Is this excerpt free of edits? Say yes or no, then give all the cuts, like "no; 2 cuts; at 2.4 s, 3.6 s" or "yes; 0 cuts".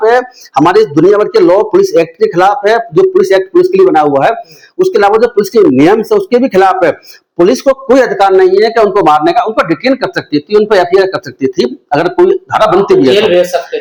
yes; 0 cuts